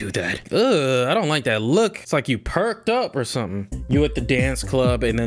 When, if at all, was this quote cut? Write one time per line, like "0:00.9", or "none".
0:03.7